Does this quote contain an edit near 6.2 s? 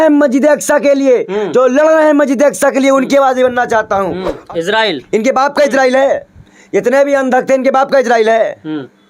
no; 1 cut; at 4.3 s

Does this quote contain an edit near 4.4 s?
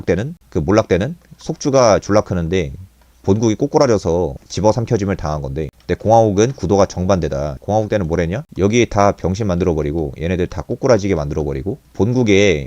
yes; 3 cuts; at 4.4 s, 7.5 s, 11.8 s

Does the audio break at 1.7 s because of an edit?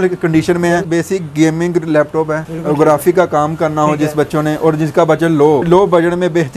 no; 1 cut; at 5.6 s

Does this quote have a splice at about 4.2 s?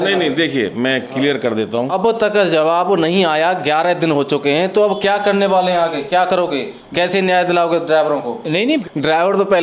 no; 2 cuts; at 1.9 s, 8.8 s

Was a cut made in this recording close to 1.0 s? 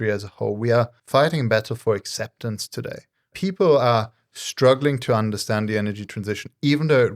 yes; 2 cuts; at 1.0 s, 3.3 s

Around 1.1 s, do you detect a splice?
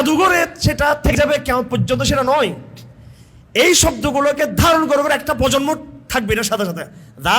yes; 1 cut; at 1.1 s

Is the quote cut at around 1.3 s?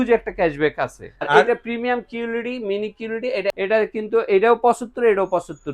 yes; 2 cuts; at 1.3 s, 3.6 s

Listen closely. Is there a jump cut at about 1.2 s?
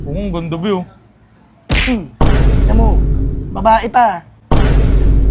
no; 0 cuts

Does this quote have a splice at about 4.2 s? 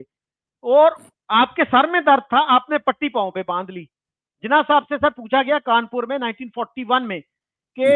yes; 1 cut; at 4.2 s

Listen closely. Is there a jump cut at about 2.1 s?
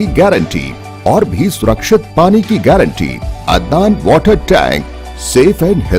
no; 1 cut; at 3.3 s

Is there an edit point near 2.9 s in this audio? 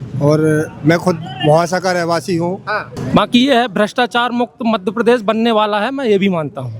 yes; 1 cut; at 2.9 s

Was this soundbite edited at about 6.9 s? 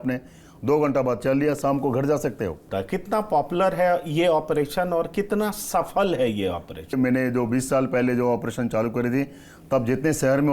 yes; 2 cuts; at 2.6 s, 6.9 s

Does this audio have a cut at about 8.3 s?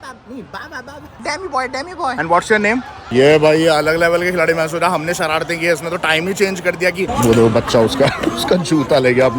no; 3 cuts; at 1.1 s, 2.5 s, 7.1 s

